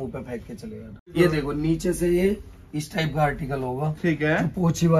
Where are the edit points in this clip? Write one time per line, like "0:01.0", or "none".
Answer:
0:01.1